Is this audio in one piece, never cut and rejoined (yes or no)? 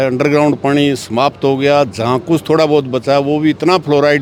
yes